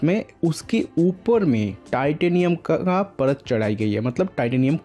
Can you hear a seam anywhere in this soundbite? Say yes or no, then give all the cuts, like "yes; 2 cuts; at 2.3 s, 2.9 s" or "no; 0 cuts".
no; 0 cuts